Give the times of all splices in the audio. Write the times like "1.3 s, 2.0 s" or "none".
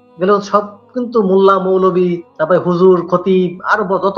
2.3 s